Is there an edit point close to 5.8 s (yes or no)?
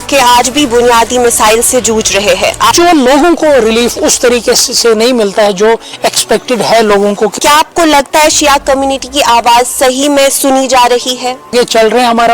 no